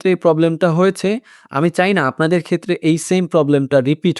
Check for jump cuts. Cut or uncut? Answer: uncut